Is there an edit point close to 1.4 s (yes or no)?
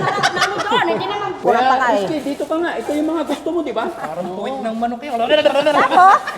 yes